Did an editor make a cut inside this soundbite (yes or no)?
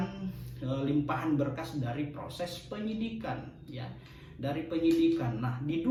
no